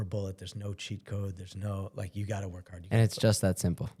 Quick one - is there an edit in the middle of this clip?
no; 0 cuts

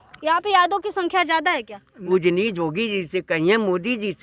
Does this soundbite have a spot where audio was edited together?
yes; 1 cut; at 1.9 s

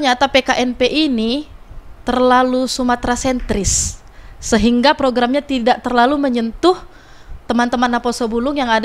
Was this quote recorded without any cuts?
yes; 0 cuts

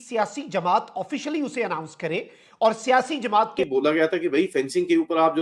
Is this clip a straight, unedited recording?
no; 1 cut; at 3.6 s

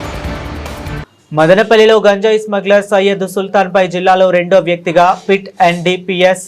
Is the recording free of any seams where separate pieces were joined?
no; 1 cut; at 1.0 s

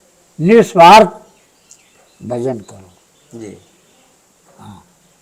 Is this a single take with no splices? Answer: yes; 0 cuts

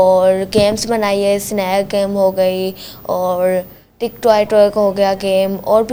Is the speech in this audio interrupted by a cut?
no; 0 cuts

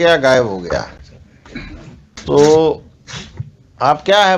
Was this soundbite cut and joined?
yes; 1 cut; at 2.2 s

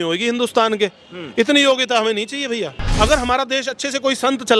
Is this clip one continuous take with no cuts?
no; 1 cut; at 2.9 s

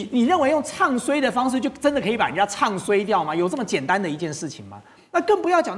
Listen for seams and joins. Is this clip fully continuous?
yes; 0 cuts

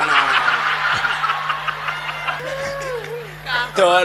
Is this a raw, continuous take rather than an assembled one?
no; 1 cut; at 2.4 s

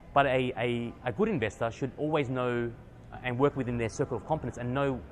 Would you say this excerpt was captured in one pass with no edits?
yes; 0 cuts

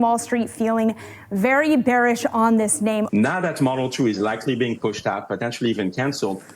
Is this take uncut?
no; 1 cut; at 3.1 s

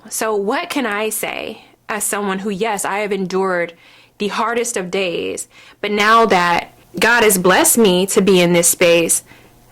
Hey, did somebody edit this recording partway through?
yes; 1 cut; at 6.8 s

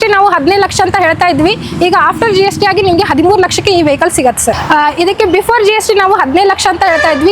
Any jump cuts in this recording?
yes; 1 cut; at 4.6 s

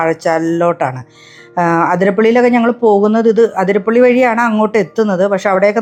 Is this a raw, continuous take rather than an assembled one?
yes; 0 cuts

